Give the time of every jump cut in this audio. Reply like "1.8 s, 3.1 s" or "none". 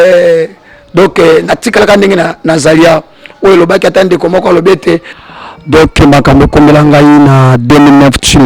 5.2 s